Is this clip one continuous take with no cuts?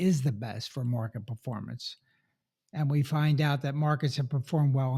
yes; 0 cuts

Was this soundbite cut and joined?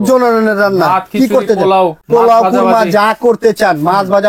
yes; 1 cut; at 2.0 s

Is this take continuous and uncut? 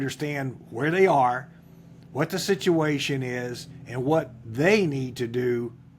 yes; 0 cuts

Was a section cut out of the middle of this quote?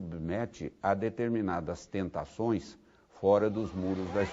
no; 0 cuts

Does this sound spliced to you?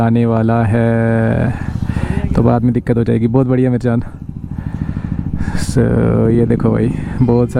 no; 0 cuts

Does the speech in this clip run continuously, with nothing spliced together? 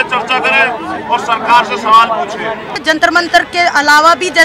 no; 1 cut; at 2.8 s

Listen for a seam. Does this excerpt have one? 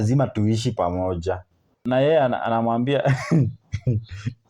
yes; 1 cut; at 1.7 s

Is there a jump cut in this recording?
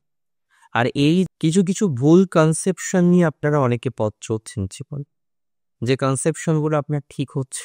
yes; 1 cut; at 1.3 s

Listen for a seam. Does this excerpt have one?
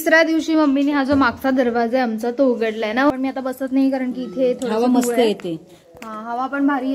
yes; 1 cut; at 3.1 s

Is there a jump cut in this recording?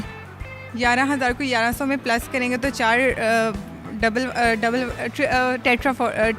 no; 0 cuts

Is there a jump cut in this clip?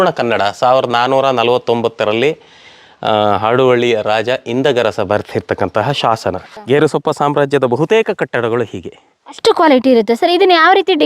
yes; 1 cut; at 6.6 s

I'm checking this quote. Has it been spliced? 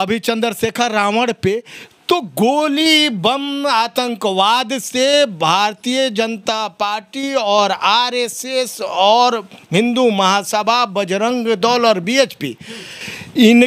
no; 0 cuts

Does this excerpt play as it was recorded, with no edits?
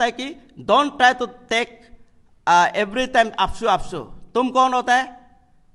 yes; 0 cuts

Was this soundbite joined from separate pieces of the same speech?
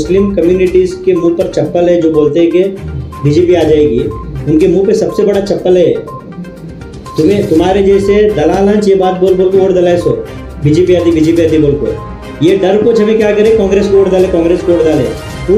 no; 0 cuts

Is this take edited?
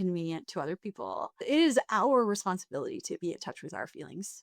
yes; 1 cut; at 1.4 s

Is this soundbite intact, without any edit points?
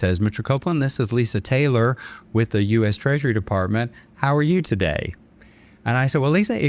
yes; 0 cuts

